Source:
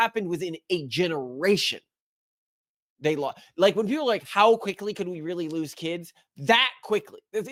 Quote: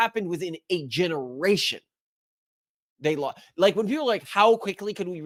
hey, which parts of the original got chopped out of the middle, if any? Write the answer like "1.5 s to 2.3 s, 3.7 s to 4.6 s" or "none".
none